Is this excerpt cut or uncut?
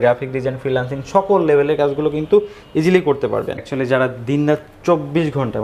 cut